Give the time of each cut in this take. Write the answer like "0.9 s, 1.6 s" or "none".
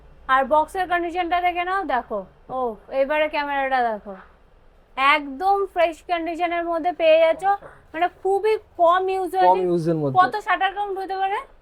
none